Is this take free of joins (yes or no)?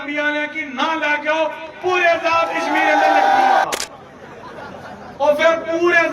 no